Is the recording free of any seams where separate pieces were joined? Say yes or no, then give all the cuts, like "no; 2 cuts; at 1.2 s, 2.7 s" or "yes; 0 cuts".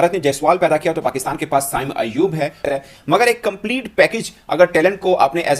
no; 1 cut; at 2.6 s